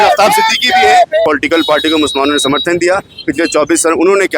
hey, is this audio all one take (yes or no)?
no